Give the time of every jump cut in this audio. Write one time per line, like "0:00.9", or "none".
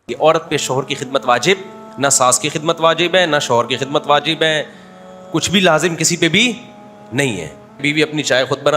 0:01.8
0:07.8